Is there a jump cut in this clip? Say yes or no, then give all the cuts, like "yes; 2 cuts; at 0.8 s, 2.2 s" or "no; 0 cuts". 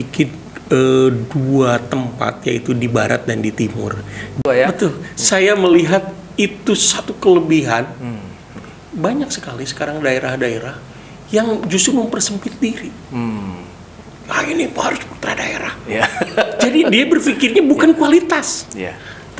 yes; 1 cut; at 4.3 s